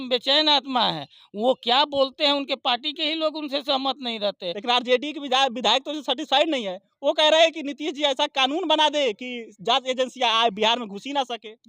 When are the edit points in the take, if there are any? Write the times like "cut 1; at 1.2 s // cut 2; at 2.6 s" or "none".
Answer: cut 1; at 4.5 s